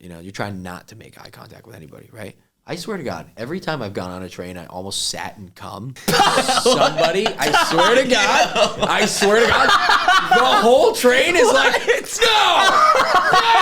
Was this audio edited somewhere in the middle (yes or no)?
yes